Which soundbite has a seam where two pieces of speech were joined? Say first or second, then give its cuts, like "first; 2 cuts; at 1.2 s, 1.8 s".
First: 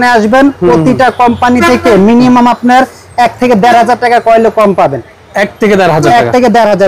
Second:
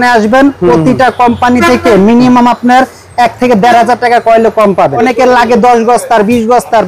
second; 1 cut; at 5.0 s